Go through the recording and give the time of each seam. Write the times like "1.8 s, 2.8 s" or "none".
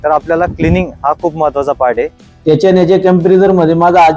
2.2 s